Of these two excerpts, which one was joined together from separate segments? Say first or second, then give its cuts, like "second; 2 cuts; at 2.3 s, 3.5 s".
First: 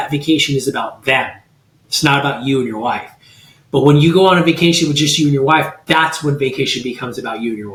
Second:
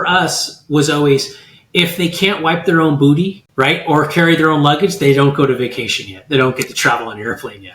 second; 1 cut; at 3.4 s